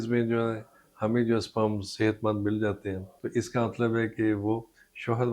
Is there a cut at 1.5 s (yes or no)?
no